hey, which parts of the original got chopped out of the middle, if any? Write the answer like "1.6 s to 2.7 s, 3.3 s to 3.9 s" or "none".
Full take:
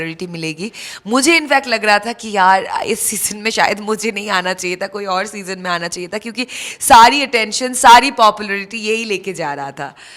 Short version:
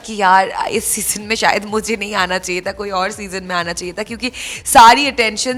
none